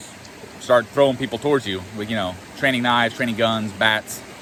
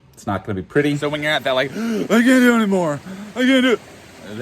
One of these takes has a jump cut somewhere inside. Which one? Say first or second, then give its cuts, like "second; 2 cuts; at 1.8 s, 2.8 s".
second; 1 cut; at 1.0 s